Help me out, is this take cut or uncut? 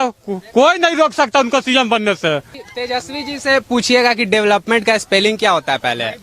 cut